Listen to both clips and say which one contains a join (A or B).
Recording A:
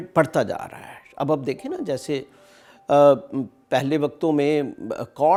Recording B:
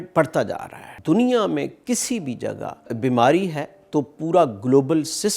B